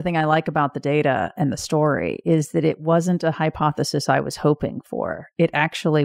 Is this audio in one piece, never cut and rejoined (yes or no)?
yes